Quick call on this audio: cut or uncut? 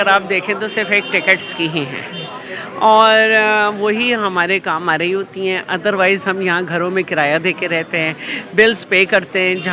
uncut